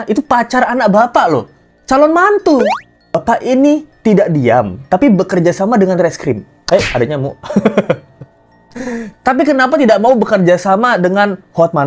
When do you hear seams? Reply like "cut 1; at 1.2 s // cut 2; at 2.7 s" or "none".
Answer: cut 1; at 3.2 s